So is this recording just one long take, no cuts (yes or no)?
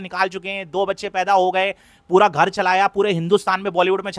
yes